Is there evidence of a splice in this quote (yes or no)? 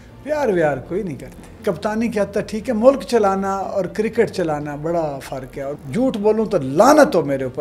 yes